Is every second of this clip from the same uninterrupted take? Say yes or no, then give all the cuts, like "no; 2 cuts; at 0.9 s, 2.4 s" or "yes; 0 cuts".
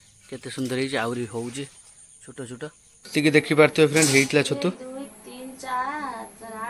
no; 1 cut; at 3.1 s